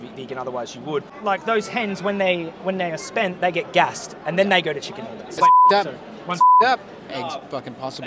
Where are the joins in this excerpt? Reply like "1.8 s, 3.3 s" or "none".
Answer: 1.1 s, 5.4 s, 7.0 s

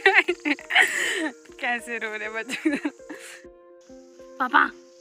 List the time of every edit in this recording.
3.6 s

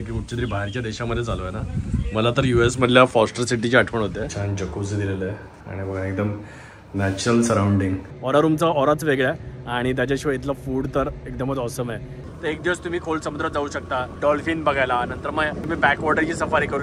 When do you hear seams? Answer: 4.3 s, 8.1 s, 12.2 s, 15.6 s

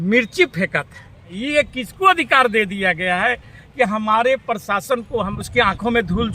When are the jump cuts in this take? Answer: 1.4 s, 5.3 s

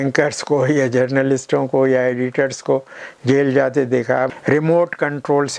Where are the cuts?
4.3 s

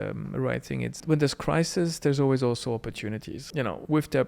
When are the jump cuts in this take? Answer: 1.0 s, 3.4 s

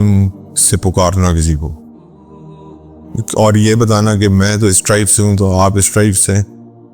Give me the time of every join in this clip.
1.7 s, 3.1 s

